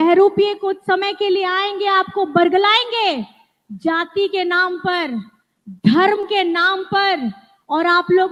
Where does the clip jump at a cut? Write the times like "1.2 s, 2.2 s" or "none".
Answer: none